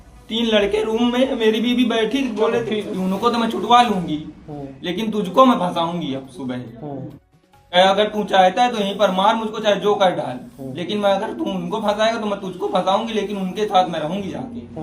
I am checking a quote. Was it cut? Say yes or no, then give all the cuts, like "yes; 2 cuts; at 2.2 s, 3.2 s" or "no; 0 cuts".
yes; 1 cut; at 2.9 s